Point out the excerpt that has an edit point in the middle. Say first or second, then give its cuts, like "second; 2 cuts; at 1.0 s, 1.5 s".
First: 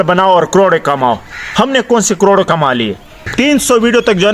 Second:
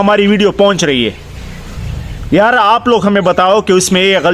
first; 1 cut; at 3.2 s